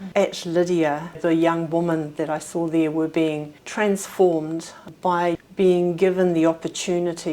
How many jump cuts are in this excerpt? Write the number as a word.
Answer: two